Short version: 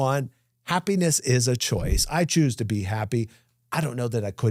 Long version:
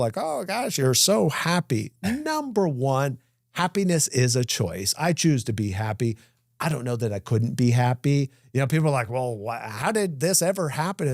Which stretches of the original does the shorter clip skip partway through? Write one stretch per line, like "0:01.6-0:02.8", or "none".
none